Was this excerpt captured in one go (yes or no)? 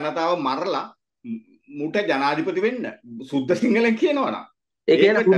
yes